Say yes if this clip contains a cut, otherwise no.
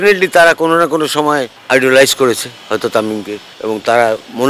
yes